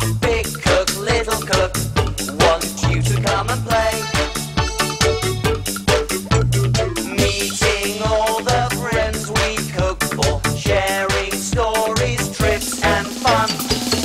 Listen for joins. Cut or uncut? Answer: uncut